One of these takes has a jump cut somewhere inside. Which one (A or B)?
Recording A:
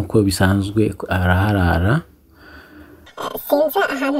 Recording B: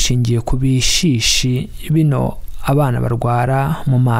A